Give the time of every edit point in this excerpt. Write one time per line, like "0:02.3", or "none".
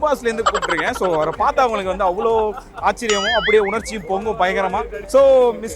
none

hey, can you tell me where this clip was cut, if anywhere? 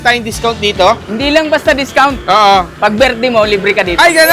0:01.1

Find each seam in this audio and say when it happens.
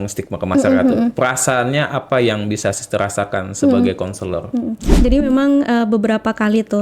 0:04.8

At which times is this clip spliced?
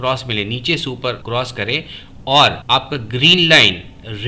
0:01.2
0:02.6

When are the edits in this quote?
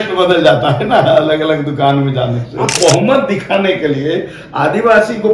0:02.8

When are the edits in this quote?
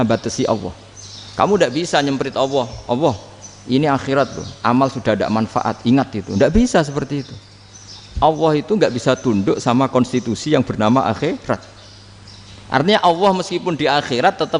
none

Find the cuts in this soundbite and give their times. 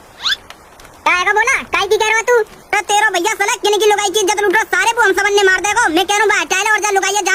none

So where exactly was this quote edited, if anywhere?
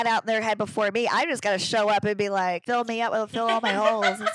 0:02.6

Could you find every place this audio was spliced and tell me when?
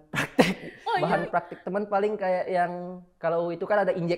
0:01.0

